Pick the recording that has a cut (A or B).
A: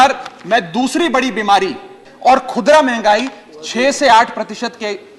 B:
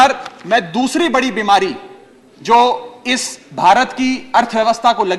A